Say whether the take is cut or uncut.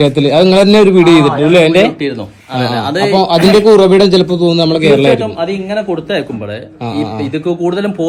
uncut